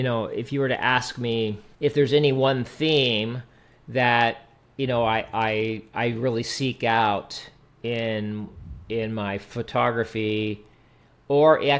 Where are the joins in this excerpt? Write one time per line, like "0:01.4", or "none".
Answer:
0:01.7

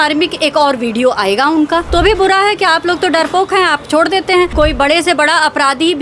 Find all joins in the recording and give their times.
0:01.9
0:04.5

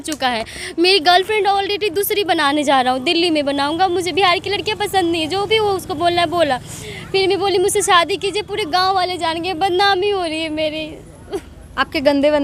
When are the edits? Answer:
none

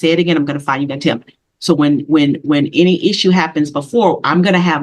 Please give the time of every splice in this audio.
none

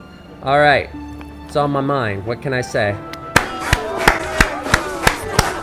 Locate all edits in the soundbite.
0:03.2

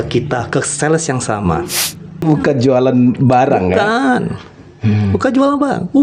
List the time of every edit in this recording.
0:02.2

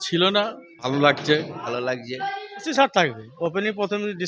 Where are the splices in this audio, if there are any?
0:00.9
0:01.6
0:02.7

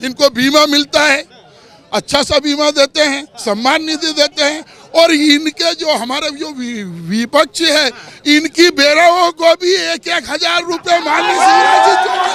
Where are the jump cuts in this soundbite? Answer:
none

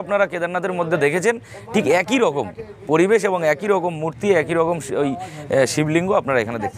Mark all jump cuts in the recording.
none

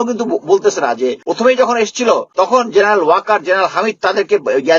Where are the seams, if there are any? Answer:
0:01.2
0:02.3

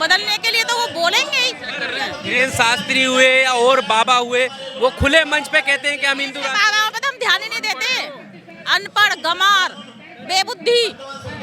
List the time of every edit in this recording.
0:01.8

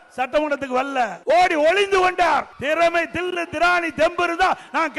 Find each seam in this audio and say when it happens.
0:01.2
0:02.5

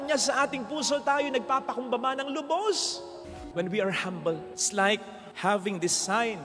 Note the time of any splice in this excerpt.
0:03.4

